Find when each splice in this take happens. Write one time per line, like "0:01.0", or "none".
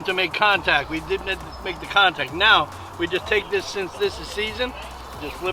none